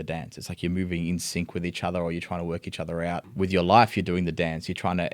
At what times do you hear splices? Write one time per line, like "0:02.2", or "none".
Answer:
0:03.3